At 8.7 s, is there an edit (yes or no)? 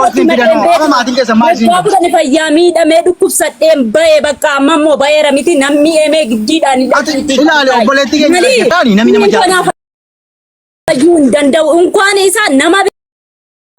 yes